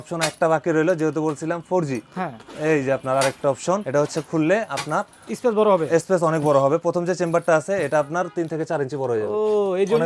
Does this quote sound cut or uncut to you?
uncut